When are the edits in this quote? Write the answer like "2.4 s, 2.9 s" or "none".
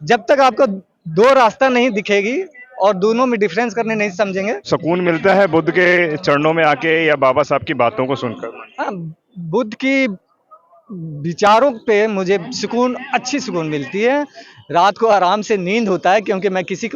4.7 s